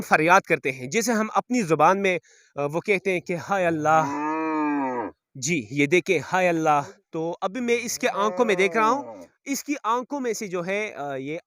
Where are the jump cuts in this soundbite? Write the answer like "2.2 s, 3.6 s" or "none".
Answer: 7.0 s